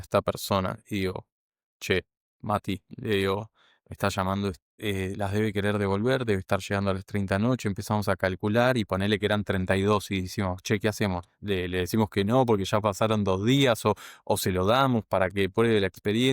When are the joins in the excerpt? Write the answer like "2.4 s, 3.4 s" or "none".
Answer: 4.7 s